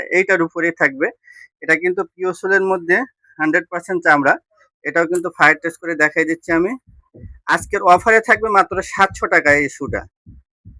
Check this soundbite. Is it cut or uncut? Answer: uncut